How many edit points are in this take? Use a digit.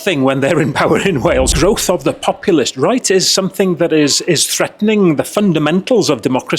1